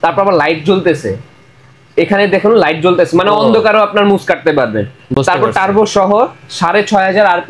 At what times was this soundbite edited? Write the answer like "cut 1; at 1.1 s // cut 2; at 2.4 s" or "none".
none